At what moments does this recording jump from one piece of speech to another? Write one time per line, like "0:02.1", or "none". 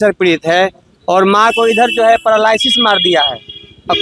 none